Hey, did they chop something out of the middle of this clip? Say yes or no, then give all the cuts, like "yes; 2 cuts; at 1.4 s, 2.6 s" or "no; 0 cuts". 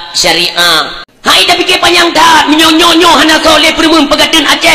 yes; 1 cut; at 1.0 s